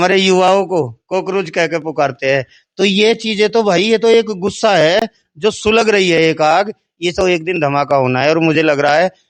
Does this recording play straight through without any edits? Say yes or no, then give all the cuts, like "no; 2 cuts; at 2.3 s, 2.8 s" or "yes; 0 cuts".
yes; 0 cuts